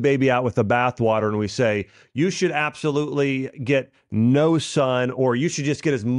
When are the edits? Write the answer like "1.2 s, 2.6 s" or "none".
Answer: none